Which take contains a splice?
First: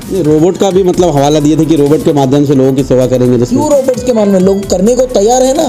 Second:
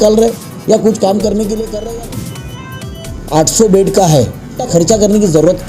second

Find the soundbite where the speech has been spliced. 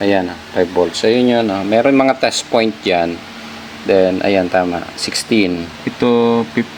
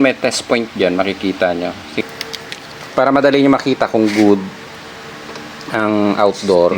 second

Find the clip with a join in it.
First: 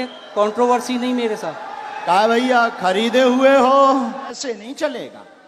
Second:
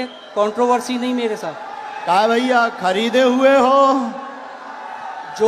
first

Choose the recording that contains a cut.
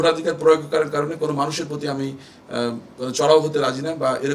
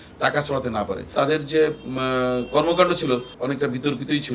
second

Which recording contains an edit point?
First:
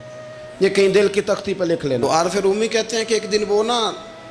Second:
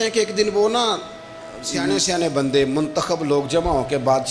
first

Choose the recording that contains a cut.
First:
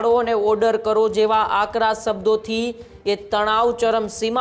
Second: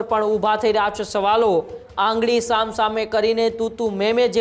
second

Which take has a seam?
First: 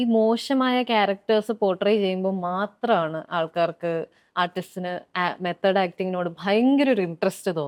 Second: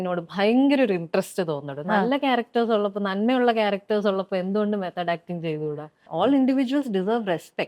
second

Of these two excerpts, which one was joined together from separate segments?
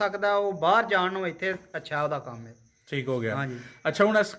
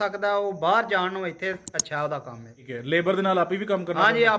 second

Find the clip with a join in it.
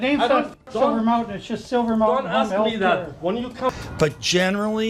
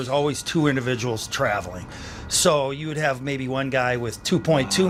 first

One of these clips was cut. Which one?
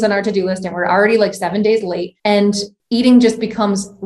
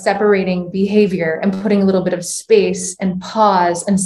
first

